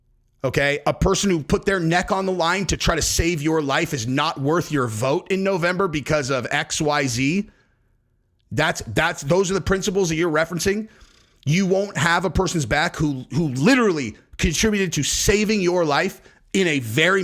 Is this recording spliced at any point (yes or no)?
no